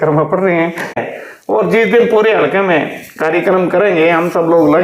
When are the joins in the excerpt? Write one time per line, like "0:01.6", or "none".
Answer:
0:01.0